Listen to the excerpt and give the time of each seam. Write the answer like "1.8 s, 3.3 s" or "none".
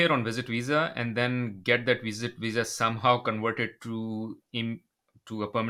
none